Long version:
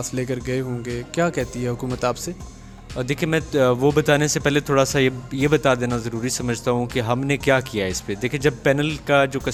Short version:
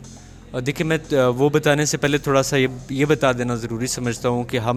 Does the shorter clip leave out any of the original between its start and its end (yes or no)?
no